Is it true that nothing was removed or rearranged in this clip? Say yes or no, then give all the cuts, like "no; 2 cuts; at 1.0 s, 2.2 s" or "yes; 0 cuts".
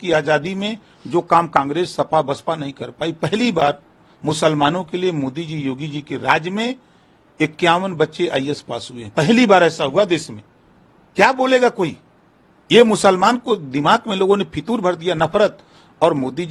yes; 0 cuts